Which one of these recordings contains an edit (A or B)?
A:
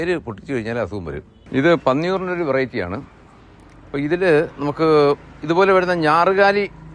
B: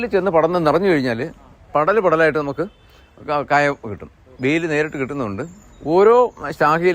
A